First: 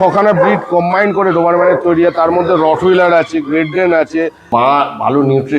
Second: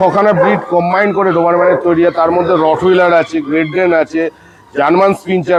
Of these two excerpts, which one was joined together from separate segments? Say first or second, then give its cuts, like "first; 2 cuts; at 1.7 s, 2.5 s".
first; 1 cut; at 4.4 s